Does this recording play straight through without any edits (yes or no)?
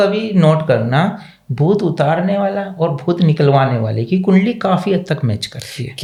yes